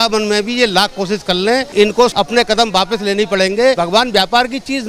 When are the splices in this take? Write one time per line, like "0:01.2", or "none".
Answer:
0:01.9
0:03.8